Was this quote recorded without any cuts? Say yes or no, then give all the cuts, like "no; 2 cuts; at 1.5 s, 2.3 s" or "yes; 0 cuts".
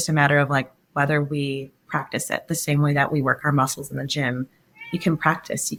yes; 0 cuts